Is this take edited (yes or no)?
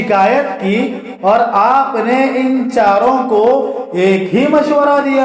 no